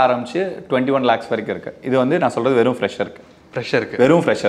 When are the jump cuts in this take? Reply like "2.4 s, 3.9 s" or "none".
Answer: none